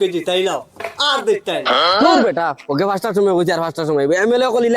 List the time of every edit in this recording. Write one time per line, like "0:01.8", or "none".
0:01.9

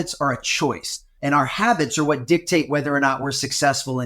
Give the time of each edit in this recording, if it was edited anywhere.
0:01.1

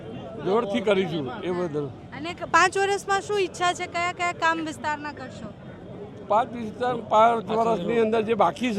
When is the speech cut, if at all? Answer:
none

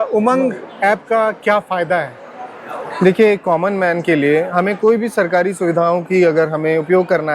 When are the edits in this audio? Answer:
none

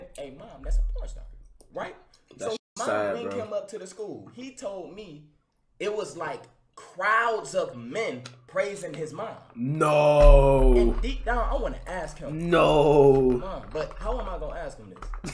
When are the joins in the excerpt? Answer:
none

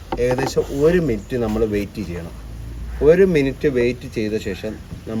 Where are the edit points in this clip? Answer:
none

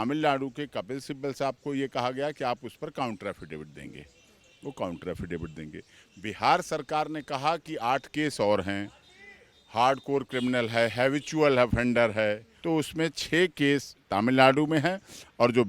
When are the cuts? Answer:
0:12.5

